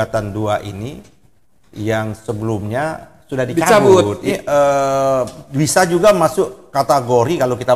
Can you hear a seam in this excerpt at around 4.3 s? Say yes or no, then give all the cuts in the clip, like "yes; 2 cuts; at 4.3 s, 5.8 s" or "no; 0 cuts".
yes; 1 cut; at 4.3 s